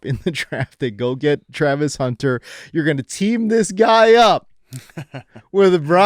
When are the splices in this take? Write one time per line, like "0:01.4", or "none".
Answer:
none